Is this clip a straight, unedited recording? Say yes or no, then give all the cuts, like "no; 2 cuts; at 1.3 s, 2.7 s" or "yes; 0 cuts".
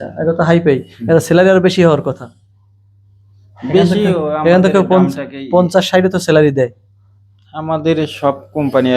yes; 0 cuts